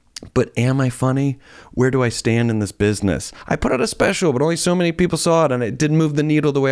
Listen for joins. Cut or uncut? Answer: cut